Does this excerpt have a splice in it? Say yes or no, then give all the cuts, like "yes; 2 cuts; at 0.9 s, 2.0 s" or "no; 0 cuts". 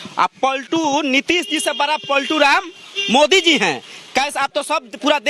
no; 0 cuts